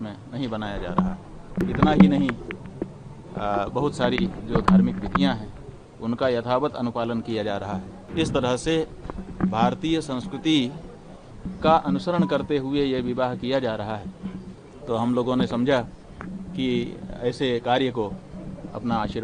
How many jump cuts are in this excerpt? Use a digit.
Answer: 2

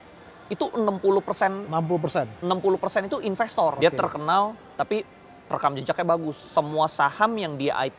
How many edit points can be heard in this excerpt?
1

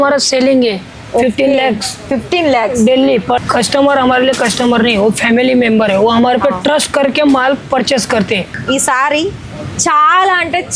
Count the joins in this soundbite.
2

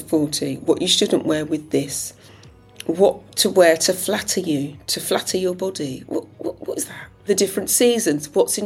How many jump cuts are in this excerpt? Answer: 1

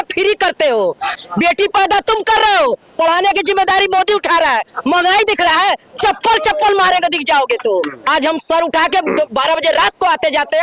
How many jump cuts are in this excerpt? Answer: 2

